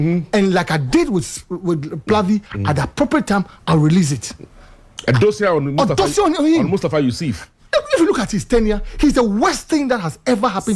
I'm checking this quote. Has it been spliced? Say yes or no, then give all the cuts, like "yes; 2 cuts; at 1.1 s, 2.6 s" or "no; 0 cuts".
no; 0 cuts